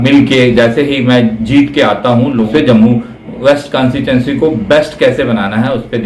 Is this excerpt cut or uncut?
cut